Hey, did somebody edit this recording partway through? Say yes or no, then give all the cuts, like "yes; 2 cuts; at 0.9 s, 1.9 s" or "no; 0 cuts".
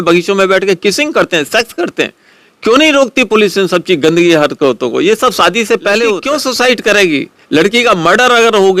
yes; 1 cut; at 6.2 s